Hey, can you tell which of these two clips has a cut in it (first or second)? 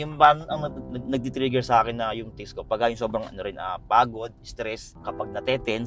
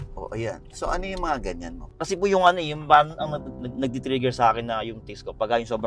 second